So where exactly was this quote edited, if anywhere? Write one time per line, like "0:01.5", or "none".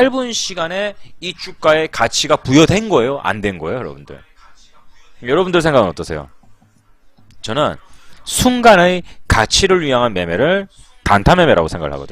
0:01.9